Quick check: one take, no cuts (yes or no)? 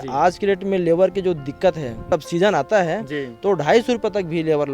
no